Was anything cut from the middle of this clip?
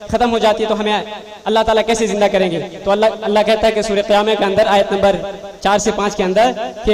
no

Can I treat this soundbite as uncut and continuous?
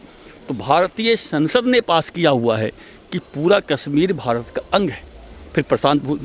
yes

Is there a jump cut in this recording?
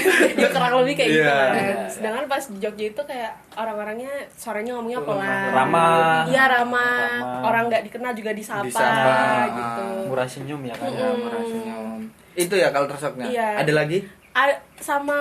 no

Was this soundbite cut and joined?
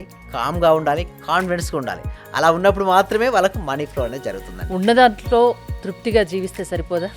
no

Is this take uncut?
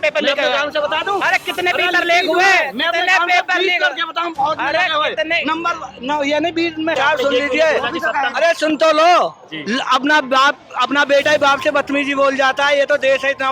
no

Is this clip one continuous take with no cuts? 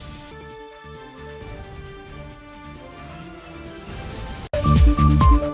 no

